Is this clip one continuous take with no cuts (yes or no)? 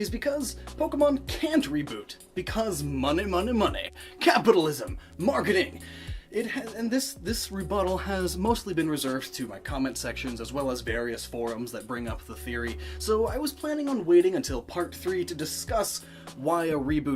no